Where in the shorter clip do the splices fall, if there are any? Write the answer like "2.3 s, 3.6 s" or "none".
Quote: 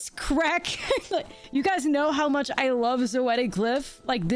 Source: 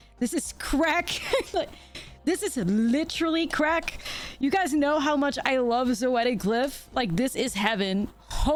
1.4 s